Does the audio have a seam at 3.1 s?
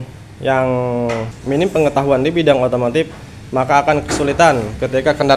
no; 1 cut; at 1.3 s

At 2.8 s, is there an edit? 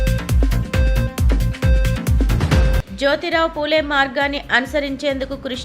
yes; 1 cut; at 2.8 s

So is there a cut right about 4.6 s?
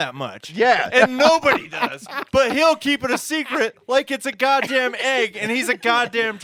no; 0 cuts

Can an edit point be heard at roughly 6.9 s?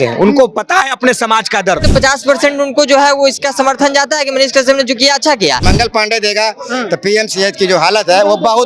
no; 2 cuts; at 1.9 s, 5.6 s

